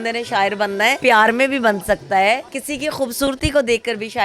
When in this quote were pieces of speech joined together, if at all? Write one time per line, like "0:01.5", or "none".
0:01.0
0:02.6